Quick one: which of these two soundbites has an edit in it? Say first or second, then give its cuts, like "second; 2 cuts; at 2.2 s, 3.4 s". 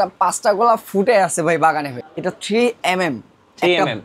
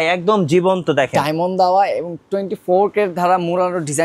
first; 1 cut; at 2.0 s